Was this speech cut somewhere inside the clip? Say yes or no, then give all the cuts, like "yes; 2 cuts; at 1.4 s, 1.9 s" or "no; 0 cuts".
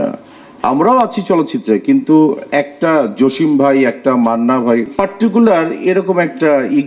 yes; 1 cut; at 4.9 s